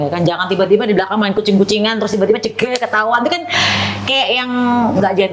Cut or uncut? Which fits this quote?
uncut